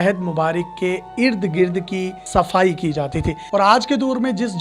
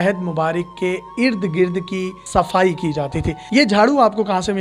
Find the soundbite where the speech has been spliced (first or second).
first